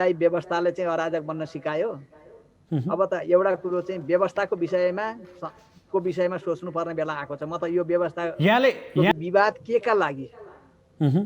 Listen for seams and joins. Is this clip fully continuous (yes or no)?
no